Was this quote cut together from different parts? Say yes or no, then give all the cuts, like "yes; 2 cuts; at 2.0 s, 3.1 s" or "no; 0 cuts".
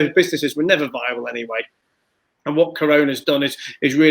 no; 0 cuts